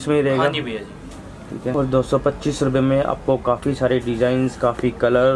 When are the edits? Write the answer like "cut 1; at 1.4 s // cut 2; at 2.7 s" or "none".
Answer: cut 1; at 1.8 s